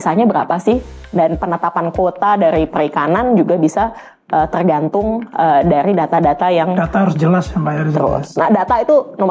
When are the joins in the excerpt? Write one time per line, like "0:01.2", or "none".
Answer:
none